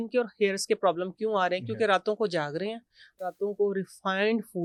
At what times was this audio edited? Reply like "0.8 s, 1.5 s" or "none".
none